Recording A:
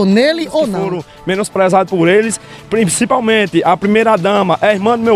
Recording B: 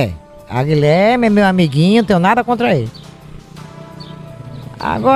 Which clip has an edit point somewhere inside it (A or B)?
A